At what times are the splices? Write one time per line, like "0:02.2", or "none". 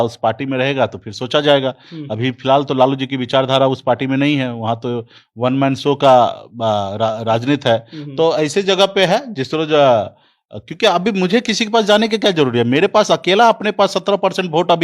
none